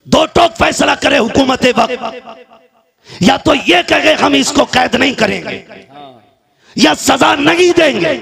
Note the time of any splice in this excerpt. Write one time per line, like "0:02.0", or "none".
none